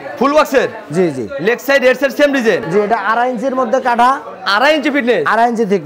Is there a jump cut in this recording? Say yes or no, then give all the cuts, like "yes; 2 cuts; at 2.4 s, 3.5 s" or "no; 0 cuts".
no; 0 cuts